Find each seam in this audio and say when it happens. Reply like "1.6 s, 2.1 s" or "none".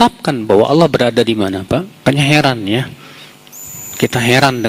2.0 s